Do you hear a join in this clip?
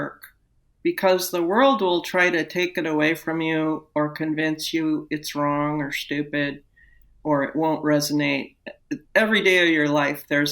yes; 1 cut; at 7.1 s

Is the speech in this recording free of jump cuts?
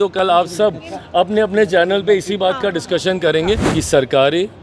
no; 1 cut; at 3.7 s

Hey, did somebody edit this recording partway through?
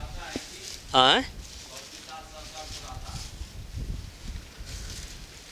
no; 0 cuts

